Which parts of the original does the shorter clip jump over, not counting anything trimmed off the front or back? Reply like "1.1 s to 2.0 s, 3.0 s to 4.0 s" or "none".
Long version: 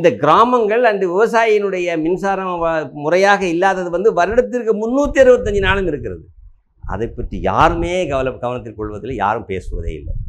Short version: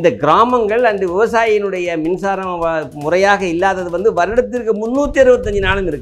none